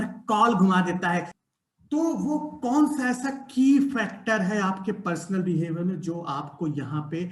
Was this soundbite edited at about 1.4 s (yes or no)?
yes